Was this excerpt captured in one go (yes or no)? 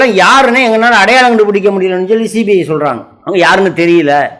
yes